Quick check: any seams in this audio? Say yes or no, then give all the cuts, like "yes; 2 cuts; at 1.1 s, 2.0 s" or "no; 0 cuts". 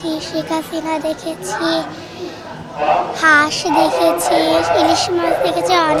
no; 0 cuts